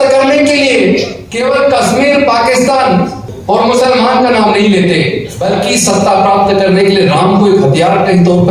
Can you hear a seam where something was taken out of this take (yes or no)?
yes